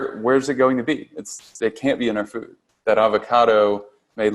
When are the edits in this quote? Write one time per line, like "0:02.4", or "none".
0:02.7